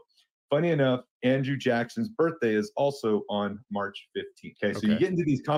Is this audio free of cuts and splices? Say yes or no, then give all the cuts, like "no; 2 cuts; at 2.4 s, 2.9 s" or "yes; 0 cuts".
no; 1 cut; at 4.4 s